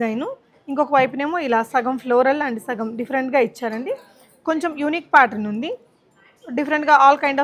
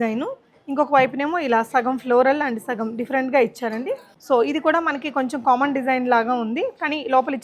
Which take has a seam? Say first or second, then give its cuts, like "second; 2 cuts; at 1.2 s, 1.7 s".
second; 1 cut; at 4.1 s